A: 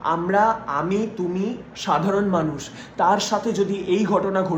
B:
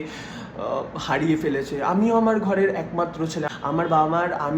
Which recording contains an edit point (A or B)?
B